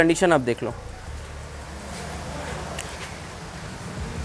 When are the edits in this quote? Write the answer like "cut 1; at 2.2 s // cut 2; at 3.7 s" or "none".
none